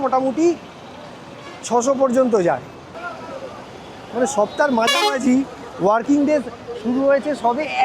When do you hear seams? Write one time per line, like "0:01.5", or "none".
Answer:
0:03.0

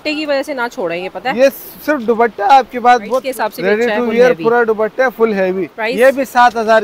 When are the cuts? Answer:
0:03.3
0:05.8

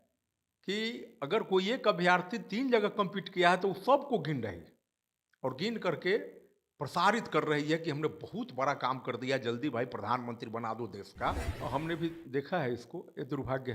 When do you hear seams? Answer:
0:11.5

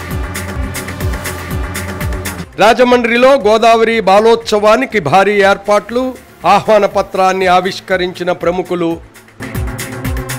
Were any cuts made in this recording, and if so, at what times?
0:02.4

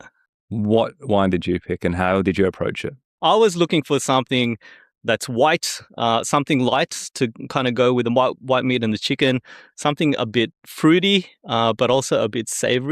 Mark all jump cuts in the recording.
0:03.1

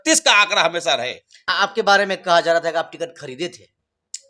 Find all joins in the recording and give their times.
0:01.4

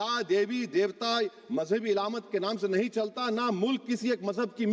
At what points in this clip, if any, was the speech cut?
none

